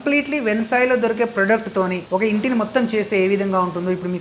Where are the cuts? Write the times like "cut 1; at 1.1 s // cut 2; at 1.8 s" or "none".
cut 1; at 2.0 s